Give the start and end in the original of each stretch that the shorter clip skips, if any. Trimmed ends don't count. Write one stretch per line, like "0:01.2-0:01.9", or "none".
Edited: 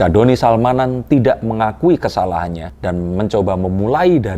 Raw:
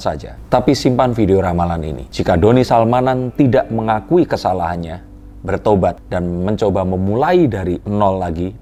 0:05.1-0:06.1